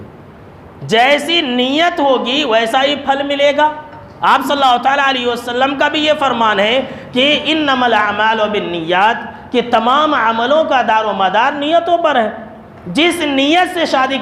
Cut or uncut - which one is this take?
uncut